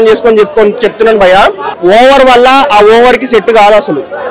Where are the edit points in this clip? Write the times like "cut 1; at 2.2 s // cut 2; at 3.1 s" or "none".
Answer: cut 1; at 1.7 s